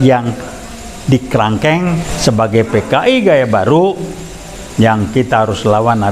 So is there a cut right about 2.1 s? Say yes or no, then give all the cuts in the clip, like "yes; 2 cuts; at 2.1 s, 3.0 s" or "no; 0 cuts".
yes; 1 cut; at 2.1 s